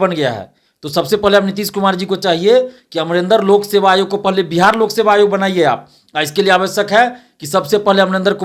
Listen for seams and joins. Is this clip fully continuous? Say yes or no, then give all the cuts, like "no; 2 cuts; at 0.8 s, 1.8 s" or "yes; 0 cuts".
yes; 0 cuts